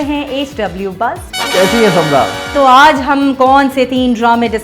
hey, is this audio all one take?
no; 2 cuts; at 1.3 s, 2.5 s

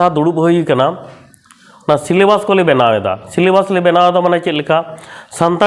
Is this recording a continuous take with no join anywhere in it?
yes; 0 cuts

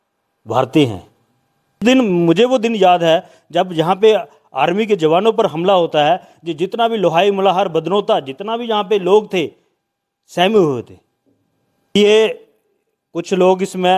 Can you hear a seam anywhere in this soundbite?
yes; 2 cuts; at 1.8 s, 12.0 s

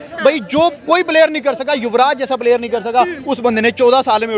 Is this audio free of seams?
yes; 0 cuts

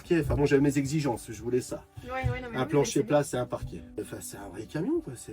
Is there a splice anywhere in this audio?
yes; 1 cut; at 3.8 s

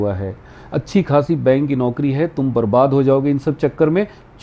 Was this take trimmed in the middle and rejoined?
no; 0 cuts

